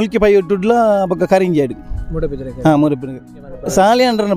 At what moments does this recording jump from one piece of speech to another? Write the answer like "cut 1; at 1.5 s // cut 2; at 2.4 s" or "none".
cut 1; at 3.2 s

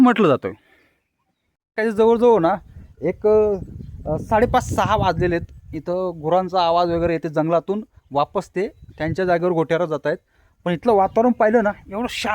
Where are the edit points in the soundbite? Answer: cut 1; at 1.6 s

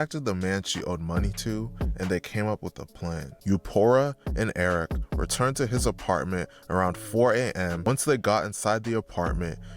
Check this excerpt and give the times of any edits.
cut 1; at 3.3 s // cut 2; at 7.8 s

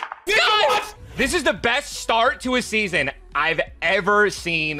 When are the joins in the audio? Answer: cut 1; at 1.0 s

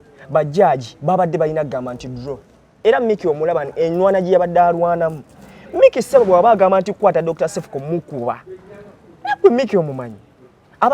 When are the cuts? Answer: cut 1; at 2.7 s

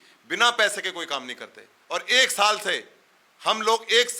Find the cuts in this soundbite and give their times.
none

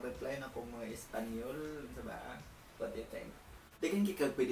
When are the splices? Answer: cut 1; at 3.6 s

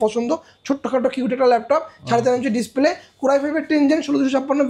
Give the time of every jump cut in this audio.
none

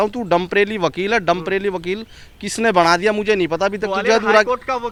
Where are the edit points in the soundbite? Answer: none

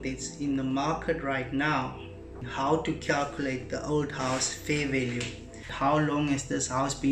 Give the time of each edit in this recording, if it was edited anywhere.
cut 1; at 2.5 s // cut 2; at 5.7 s

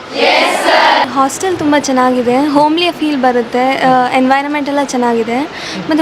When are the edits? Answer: cut 1; at 1.0 s

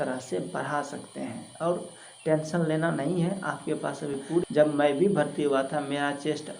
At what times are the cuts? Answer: cut 1; at 4.4 s

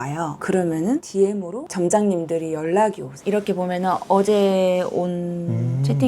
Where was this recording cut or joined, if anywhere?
cut 1; at 3.1 s

